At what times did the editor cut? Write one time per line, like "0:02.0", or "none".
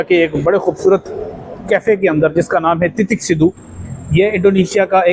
none